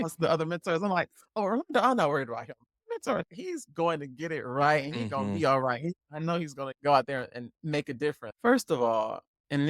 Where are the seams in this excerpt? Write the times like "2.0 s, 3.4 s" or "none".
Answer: 8.2 s